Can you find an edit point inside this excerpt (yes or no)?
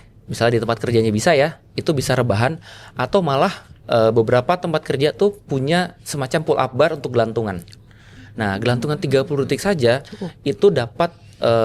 no